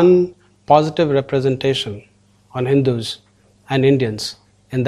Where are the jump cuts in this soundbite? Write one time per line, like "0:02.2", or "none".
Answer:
none